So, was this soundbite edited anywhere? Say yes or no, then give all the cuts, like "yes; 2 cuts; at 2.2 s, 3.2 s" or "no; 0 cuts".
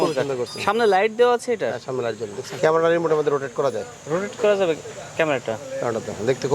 yes; 1 cut; at 2.4 s